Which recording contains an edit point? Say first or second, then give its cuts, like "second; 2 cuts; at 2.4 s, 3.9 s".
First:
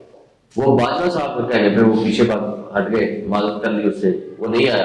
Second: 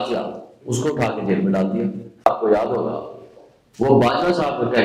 second; 1 cut; at 2.2 s